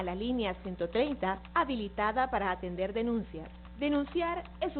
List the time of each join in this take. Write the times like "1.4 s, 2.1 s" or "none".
none